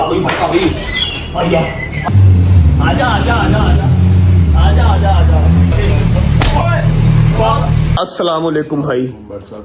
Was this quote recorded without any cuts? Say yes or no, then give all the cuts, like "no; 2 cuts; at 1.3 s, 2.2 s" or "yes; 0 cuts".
no; 3 cuts; at 2.1 s, 5.7 s, 7.9 s